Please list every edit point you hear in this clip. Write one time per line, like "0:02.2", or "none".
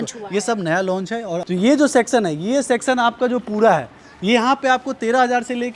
0:01.4